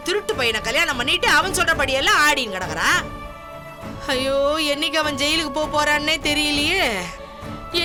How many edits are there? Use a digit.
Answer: 0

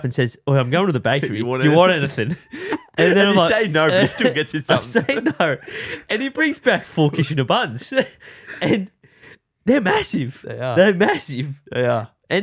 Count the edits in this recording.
0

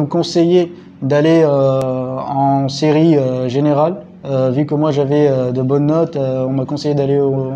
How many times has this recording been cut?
1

